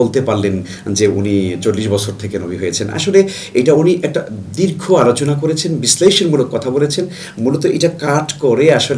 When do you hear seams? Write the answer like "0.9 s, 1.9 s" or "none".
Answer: none